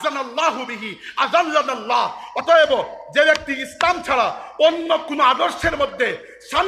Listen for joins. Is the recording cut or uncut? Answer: uncut